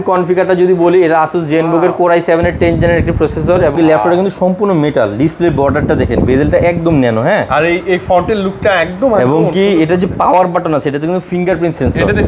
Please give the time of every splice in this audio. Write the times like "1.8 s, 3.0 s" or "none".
3.7 s